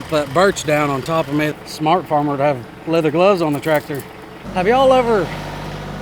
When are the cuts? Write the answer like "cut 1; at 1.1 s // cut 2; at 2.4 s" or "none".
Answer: cut 1; at 1.5 s // cut 2; at 4.5 s